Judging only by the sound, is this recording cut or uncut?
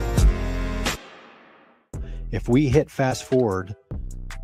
uncut